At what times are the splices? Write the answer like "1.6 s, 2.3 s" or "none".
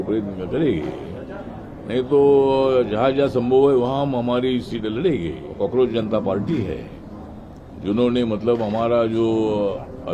5.4 s